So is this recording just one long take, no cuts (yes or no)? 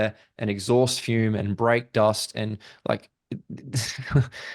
yes